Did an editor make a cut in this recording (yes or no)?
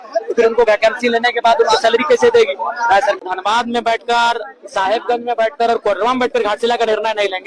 yes